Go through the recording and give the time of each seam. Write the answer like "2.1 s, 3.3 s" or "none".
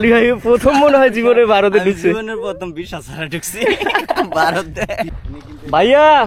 5.2 s